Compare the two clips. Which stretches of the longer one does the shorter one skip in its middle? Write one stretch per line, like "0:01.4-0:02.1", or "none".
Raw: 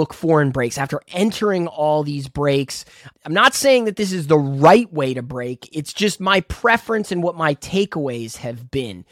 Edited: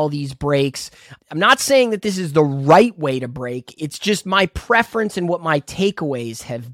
none